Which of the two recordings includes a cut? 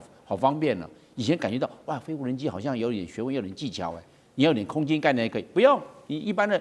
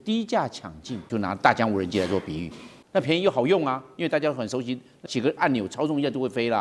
second; 3 cuts; at 1.1 s, 2.7 s, 5.0 s

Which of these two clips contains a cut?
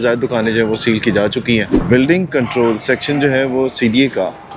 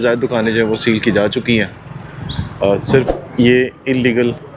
first; 1 cut; at 1.7 s

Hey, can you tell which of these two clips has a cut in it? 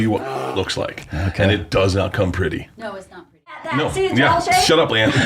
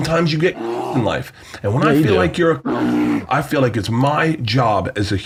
first; 1 cut; at 3.6 s

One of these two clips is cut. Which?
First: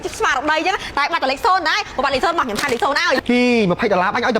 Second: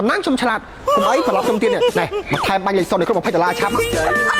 first; 1 cut; at 3.2 s

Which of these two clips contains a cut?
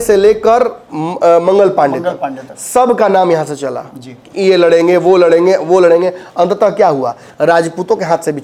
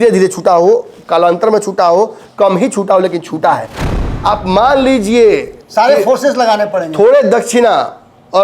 second; 1 cut; at 3.8 s

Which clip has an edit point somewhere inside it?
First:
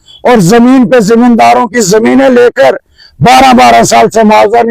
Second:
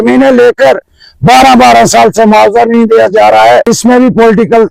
second; 1 cut; at 3.7 s

